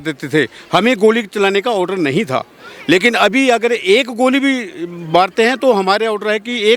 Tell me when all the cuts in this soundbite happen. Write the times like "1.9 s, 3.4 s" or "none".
none